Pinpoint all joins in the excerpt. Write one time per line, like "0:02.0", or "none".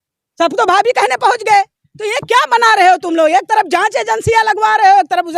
none